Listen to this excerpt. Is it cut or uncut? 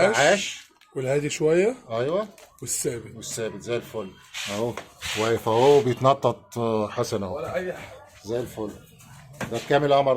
cut